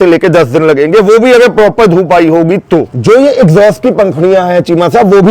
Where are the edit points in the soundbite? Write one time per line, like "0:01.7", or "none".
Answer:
0:02.9